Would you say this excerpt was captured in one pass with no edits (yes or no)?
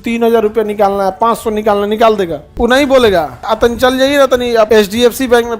no